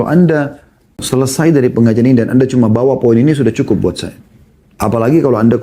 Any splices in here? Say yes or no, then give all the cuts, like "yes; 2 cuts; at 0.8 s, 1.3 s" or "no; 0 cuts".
yes; 1 cut; at 1.0 s